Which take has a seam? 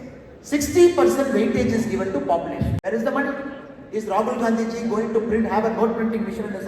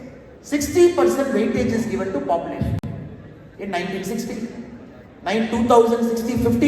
first; 1 cut; at 2.8 s

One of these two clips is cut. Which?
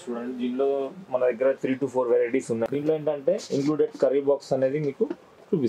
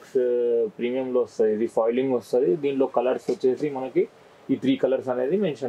first; 1 cut; at 2.7 s

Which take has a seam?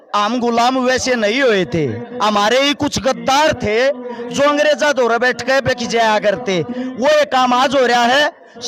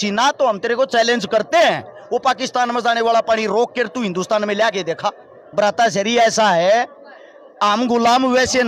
second; 1 cut; at 5.4 s

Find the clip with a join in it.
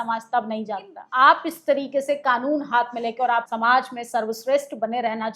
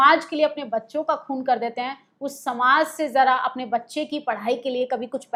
first; 2 cuts; at 1.0 s, 3.5 s

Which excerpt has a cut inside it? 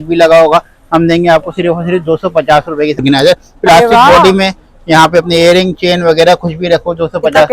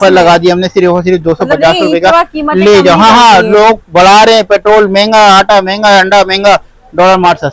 first; 1 cut; at 3.0 s

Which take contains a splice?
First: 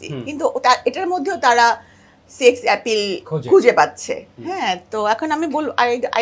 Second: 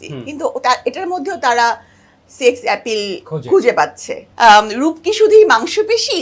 second; 1 cut; at 4.3 s

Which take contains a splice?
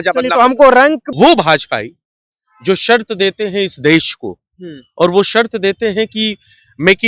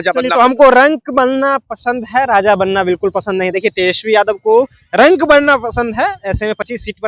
first; 1 cut; at 1.0 s

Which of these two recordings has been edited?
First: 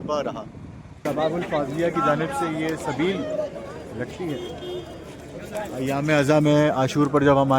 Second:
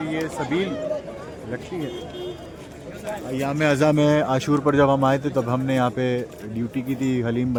first; 1 cut; at 1.0 s

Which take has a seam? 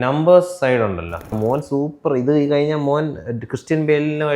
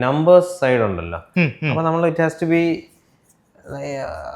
first; 1 cut; at 1.3 s

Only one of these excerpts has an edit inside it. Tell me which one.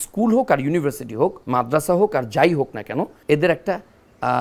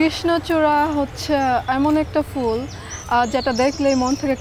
first; 2 cuts; at 1.4 s, 3.2 s

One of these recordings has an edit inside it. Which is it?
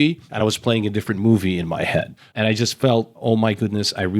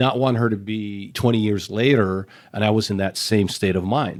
first; 2 cuts; at 2.2 s, 3.1 s

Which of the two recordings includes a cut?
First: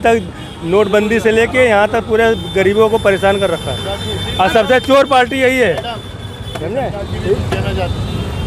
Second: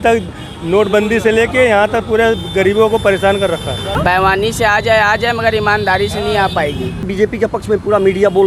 second; 2 cuts; at 4.0 s, 7.0 s

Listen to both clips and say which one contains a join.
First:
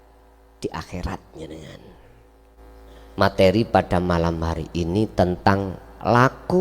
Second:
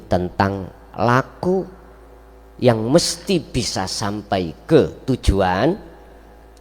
first; 1 cut; at 2.6 s

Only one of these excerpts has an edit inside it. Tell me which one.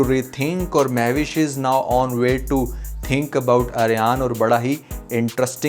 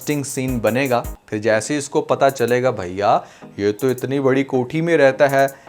second; 1 cut; at 1.1 s

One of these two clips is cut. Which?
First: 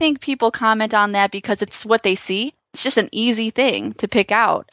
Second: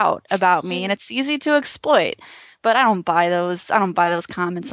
first; 2 cuts; at 1.8 s, 2.8 s

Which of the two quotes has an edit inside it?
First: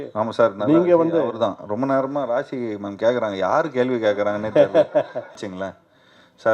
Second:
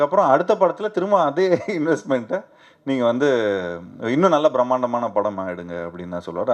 first; 1 cut; at 5.4 s

